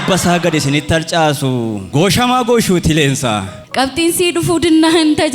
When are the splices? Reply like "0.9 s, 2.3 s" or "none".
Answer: 3.6 s